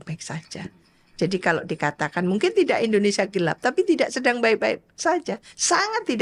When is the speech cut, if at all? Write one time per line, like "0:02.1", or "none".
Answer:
none

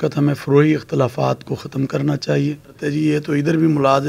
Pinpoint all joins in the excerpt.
0:02.7

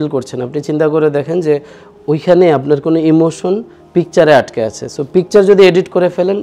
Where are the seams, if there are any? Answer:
none

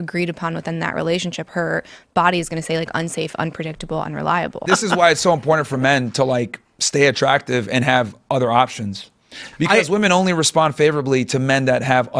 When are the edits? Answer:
0:04.6

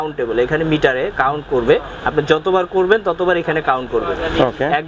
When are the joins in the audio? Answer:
none

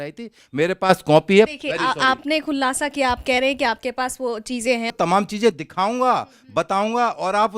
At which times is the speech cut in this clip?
0:01.5
0:04.9

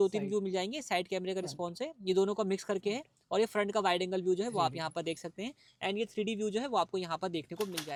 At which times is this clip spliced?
none

